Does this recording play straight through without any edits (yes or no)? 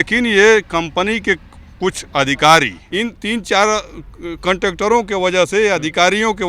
no